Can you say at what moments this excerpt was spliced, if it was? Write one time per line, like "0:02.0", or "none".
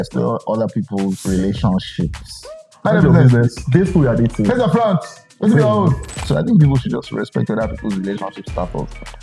0:01.2
0:02.7
0:06.3

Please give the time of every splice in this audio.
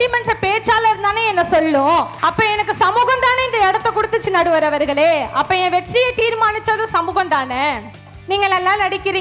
0:02.1
0:08.1

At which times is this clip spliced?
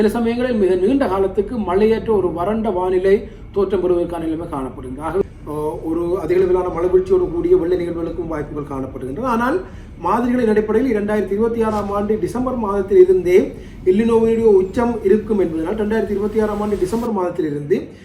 0:05.2

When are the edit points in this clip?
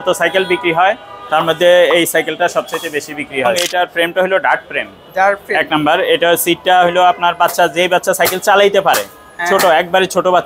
0:03.6

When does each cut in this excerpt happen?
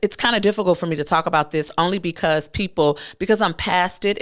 none

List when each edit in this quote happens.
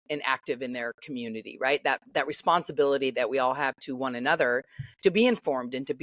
none

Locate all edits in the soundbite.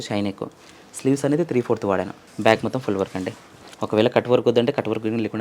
0:02.2

